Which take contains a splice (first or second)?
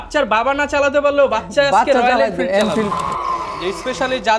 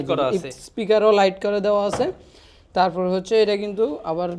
first